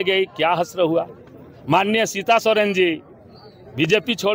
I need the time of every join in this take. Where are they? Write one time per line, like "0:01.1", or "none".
none